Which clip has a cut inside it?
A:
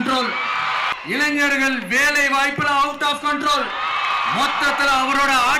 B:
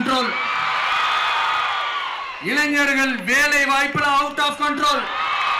A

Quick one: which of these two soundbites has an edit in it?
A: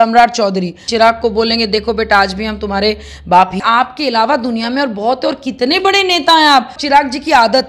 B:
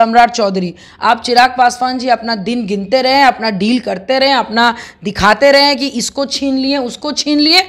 A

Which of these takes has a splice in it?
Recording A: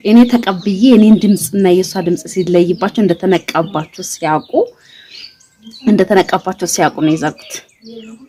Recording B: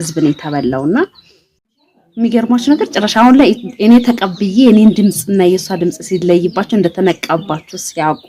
B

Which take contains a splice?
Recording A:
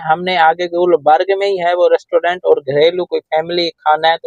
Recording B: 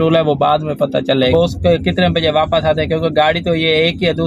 B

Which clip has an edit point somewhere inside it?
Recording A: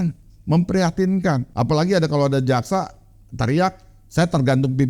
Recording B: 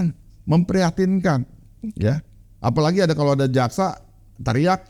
A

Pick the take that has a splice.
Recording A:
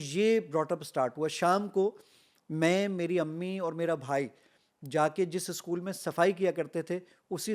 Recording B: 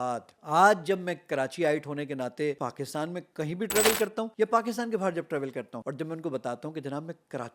B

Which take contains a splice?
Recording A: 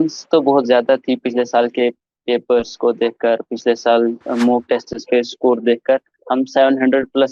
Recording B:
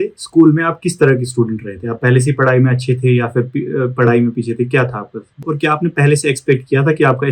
B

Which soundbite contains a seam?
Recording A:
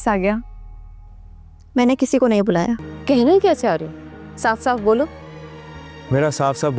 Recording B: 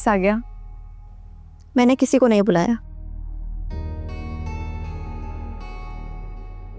A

